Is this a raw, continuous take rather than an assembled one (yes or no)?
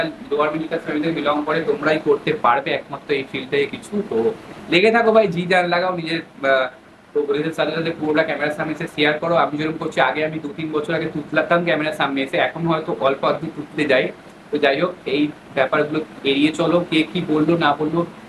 yes